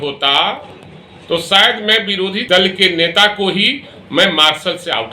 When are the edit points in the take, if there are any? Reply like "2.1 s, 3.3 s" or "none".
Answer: 2.4 s